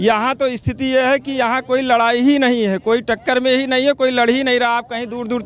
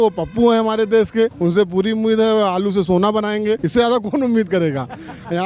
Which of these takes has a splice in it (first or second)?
second